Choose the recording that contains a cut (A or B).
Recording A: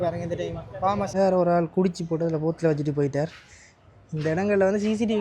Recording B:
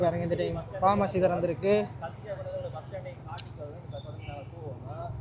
A